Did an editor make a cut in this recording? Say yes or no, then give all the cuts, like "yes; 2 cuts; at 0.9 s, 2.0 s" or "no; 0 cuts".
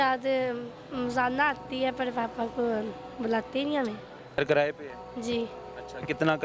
yes; 1 cut; at 4.4 s